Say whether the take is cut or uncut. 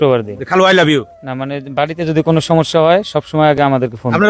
uncut